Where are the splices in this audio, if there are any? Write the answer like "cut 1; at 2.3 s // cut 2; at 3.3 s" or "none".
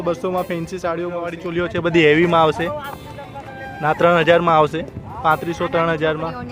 cut 1; at 1.4 s